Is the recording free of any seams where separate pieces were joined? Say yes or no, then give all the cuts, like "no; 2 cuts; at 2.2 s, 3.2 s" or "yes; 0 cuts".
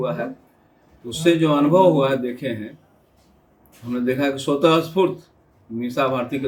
yes; 0 cuts